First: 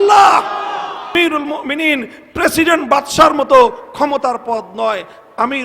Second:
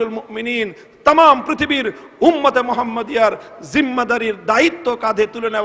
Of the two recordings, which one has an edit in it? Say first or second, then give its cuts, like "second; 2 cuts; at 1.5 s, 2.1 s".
first; 1 cut; at 1.0 s